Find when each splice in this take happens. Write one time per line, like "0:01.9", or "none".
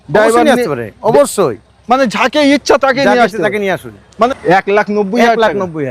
0:04.3